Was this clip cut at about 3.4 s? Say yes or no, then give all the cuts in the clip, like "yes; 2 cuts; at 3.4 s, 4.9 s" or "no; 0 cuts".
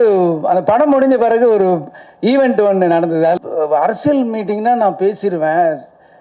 yes; 1 cut; at 3.4 s